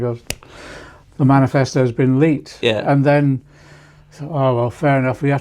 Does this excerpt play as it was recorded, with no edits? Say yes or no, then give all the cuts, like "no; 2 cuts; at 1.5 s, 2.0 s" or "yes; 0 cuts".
yes; 0 cuts